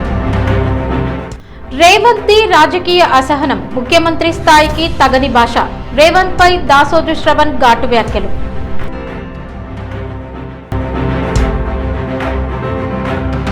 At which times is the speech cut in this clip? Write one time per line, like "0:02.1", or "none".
0:01.2
0:10.6